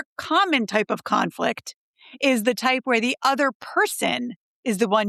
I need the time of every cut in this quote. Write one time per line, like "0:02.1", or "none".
none